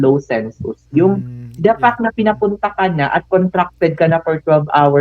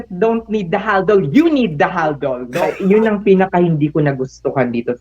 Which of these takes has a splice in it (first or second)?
second